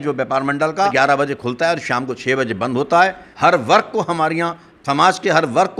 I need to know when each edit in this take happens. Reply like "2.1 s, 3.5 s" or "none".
0.9 s, 3.2 s